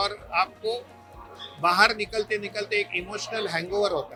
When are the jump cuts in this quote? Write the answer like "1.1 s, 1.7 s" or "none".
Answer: none